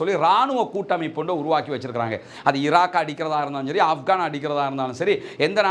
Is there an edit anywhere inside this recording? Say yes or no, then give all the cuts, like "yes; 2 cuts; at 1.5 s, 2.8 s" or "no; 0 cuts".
no; 0 cuts